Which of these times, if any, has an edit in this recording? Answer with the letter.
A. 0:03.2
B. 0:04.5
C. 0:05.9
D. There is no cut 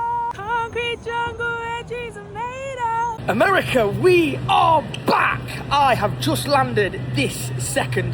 A